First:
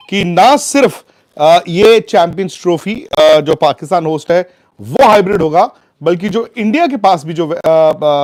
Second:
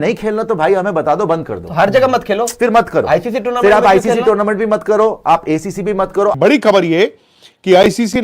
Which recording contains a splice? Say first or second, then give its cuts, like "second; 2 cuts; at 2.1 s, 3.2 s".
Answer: second; 1 cut; at 6.3 s